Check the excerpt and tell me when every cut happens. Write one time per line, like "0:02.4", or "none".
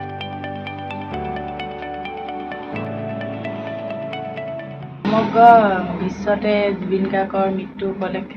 0:05.0